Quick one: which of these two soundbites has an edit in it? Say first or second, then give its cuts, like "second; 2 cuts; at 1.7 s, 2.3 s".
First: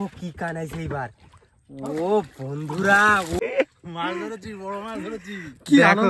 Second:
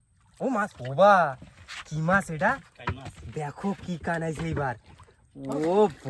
first; 1 cut; at 3.4 s